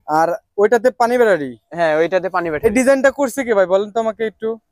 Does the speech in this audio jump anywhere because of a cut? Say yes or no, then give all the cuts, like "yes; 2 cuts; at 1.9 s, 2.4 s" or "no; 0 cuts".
yes; 1 cut; at 2.6 s